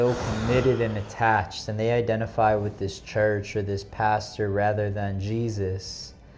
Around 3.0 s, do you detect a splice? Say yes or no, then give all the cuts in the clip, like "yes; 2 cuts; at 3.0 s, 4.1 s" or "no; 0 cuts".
no; 0 cuts